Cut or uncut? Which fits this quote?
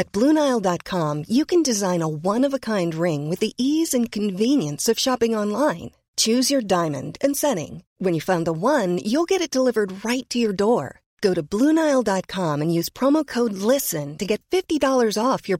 uncut